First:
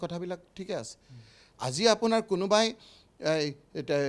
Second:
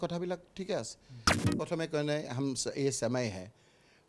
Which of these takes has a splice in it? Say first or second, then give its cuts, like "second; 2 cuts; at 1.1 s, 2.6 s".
second; 1 cut; at 1.0 s